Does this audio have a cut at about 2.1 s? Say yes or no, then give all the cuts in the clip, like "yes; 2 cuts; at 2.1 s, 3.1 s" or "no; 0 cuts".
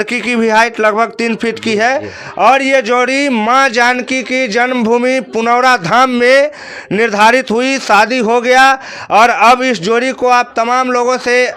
no; 0 cuts